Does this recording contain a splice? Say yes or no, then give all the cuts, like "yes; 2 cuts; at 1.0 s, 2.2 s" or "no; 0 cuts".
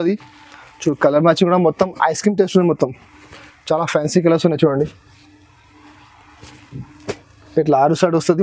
no; 0 cuts